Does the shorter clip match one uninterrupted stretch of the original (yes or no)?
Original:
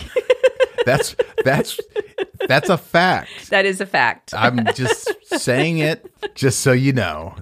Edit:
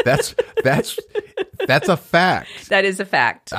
yes